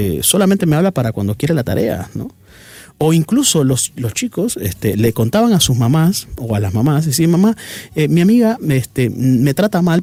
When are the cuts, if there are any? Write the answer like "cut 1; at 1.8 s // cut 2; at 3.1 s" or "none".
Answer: none